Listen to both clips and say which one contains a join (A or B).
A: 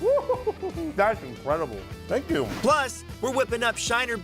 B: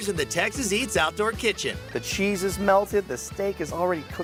A